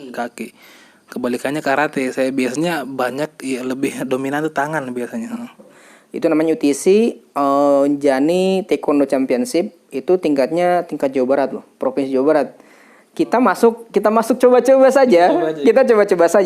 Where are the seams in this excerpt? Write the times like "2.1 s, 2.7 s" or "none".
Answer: 5.7 s